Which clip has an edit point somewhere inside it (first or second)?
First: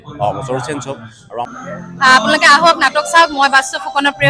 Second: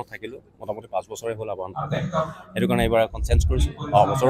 first